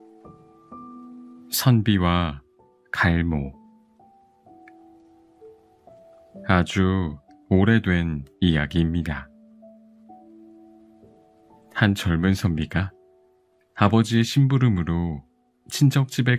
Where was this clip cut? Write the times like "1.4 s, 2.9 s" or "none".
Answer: 1.1 s